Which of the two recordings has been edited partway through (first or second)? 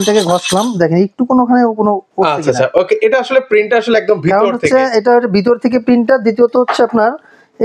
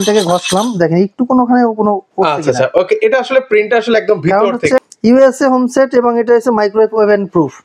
second